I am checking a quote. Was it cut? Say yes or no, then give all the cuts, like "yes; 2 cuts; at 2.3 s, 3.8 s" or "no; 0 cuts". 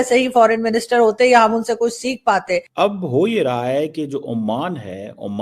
yes; 1 cut; at 2.8 s